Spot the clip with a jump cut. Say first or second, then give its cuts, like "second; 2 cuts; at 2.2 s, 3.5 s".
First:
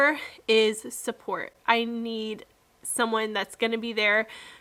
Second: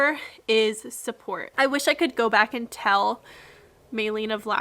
second; 1 cut; at 1.4 s